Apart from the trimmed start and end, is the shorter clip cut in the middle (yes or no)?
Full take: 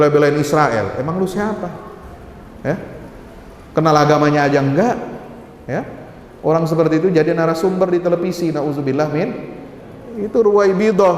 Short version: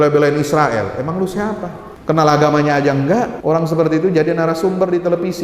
yes